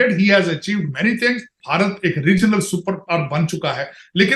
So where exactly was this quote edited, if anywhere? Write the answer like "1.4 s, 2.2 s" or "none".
1.6 s